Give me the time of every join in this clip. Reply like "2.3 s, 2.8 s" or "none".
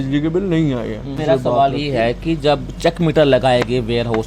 1.2 s